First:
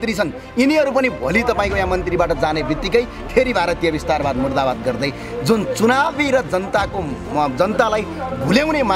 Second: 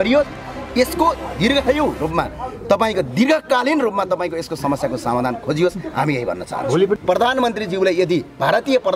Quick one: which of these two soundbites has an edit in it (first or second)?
second